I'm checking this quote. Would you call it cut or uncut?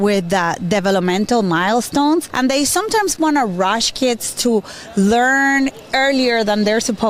uncut